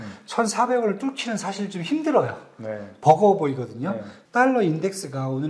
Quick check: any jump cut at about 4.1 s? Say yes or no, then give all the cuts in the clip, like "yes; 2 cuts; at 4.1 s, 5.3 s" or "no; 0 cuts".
yes; 1 cut; at 4.1 s